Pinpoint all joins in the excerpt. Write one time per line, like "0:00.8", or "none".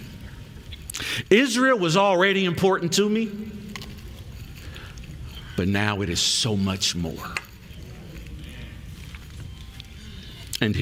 none